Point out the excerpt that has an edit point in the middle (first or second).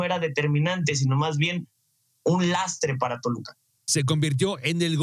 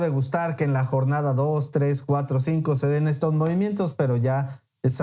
first